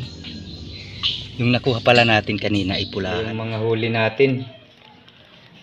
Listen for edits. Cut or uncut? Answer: cut